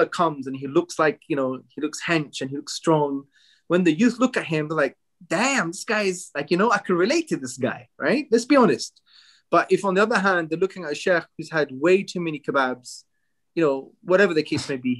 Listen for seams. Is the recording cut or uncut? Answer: uncut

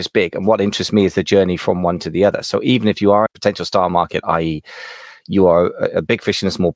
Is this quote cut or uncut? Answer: cut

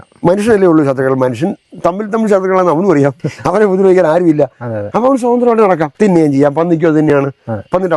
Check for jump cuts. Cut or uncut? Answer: cut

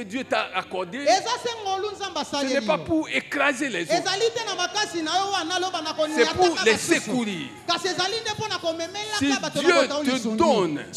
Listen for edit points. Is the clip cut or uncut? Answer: uncut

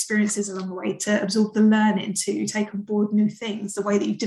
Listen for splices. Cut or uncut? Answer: uncut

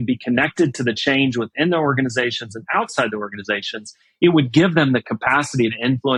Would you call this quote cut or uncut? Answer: uncut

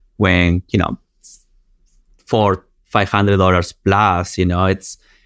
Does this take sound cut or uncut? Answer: uncut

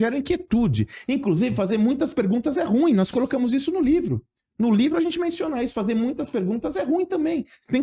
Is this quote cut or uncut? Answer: uncut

